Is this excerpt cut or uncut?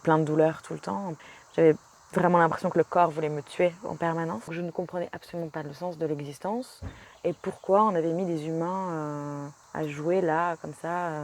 cut